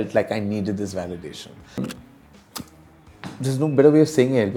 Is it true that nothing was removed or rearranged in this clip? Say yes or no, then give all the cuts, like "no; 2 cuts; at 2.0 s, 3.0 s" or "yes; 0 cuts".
no; 1 cut; at 1.9 s